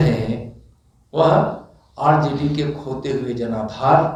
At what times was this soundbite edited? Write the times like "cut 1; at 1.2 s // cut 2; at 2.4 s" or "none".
none